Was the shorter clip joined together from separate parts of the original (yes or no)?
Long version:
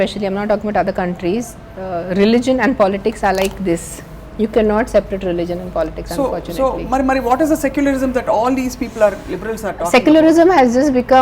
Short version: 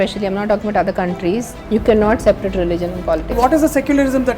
yes